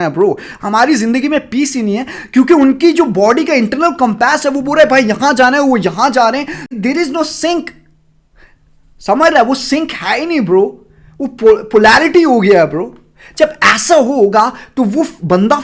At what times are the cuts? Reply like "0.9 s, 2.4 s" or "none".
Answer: 6.7 s